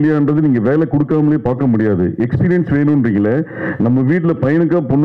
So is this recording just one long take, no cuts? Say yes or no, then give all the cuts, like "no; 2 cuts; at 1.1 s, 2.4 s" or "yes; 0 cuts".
yes; 0 cuts